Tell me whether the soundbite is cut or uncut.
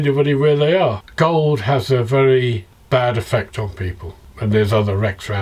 cut